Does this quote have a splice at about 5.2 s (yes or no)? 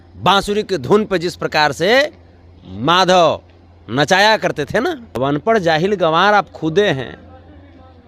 yes